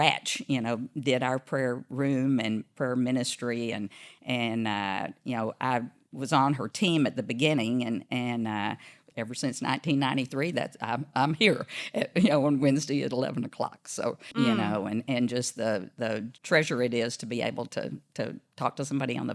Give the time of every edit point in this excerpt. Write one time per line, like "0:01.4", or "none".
0:09.0
0:14.2
0:16.3